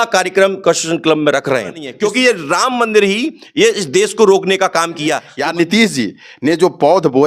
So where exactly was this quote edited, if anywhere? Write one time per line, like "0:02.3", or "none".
0:01.9
0:05.3

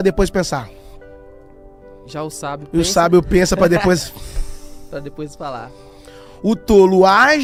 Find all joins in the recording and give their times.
none

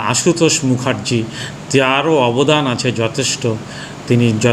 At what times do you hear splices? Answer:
none

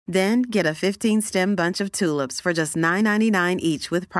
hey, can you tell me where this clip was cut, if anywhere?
none

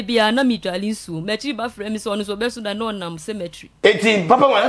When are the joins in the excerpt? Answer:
0:03.6

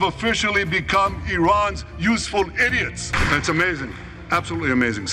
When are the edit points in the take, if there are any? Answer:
0:03.1

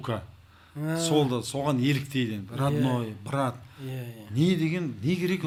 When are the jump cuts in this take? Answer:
none

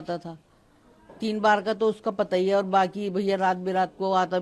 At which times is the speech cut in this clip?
none

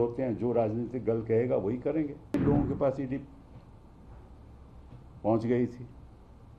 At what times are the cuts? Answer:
0:02.4

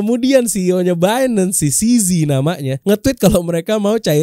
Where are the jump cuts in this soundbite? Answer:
none

